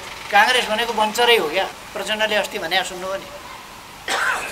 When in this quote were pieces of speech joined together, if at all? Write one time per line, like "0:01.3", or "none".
0:01.8